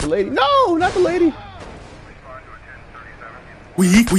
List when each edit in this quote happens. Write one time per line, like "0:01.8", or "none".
none